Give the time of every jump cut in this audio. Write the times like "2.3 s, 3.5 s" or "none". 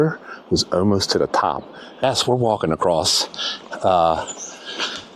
2.0 s